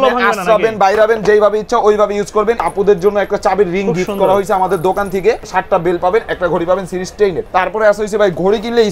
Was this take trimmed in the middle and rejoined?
yes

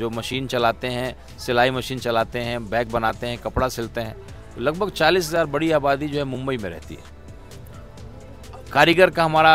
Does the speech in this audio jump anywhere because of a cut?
no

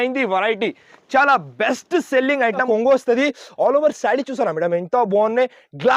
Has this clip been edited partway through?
yes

